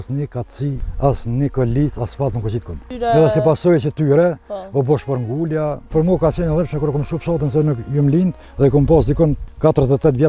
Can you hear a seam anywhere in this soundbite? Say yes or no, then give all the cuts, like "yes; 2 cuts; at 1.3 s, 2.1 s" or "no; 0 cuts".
yes; 5 cuts; at 0.9 s, 2.9 s, 5.9 s, 8.4 s, 9.4 s